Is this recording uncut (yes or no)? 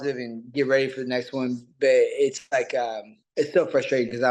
yes